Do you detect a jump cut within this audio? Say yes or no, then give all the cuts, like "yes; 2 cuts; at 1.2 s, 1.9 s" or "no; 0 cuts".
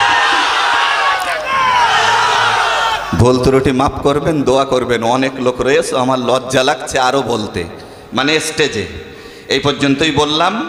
no; 0 cuts